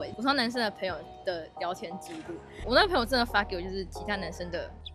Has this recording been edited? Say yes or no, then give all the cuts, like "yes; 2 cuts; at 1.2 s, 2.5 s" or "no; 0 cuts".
yes; 1 cut; at 2.5 s